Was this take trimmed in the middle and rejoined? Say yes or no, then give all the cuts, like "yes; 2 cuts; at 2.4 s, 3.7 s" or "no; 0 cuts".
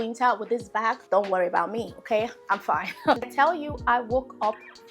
yes; 1 cut; at 3.2 s